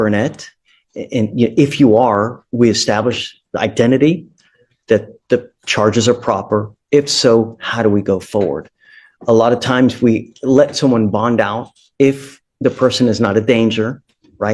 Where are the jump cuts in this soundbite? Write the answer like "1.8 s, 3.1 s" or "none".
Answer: none